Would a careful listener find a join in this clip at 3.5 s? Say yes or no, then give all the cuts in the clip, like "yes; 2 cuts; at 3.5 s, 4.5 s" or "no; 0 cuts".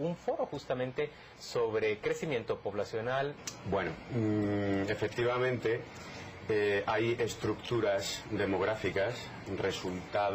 no; 0 cuts